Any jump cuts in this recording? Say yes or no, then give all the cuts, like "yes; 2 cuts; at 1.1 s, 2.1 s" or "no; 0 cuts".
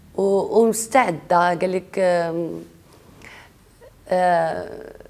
no; 0 cuts